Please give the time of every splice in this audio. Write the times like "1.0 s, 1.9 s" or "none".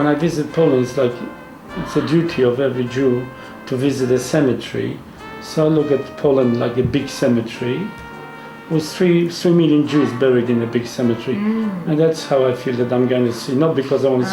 none